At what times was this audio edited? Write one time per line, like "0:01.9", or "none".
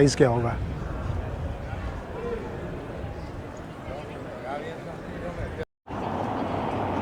none